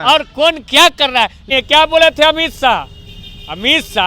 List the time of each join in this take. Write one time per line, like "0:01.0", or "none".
0:01.4